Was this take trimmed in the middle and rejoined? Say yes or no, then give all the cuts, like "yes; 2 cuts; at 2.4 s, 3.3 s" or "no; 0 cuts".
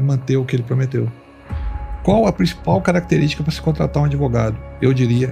yes; 1 cut; at 1.6 s